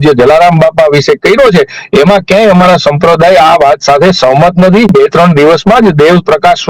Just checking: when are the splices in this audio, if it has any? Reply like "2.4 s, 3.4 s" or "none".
4.9 s